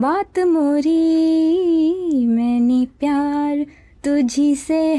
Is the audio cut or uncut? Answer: uncut